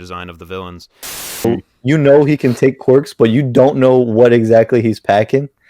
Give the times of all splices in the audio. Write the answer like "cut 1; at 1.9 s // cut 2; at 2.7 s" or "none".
cut 1; at 1.5 s